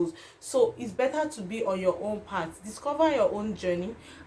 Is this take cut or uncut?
uncut